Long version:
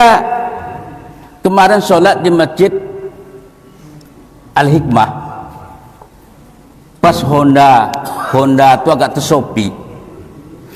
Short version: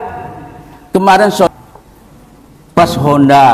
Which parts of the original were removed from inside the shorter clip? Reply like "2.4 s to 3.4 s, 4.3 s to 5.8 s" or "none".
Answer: 2.0 s to 5.7 s